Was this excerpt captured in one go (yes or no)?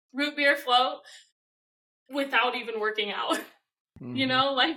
yes